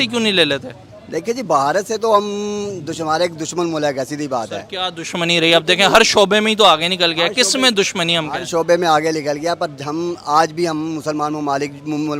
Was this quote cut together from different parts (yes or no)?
no